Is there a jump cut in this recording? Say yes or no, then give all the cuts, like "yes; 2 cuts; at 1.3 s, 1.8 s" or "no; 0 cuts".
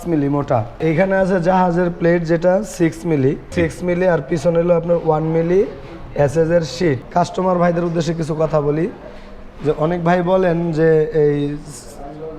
yes; 3 cuts; at 0.8 s, 3.5 s, 7.0 s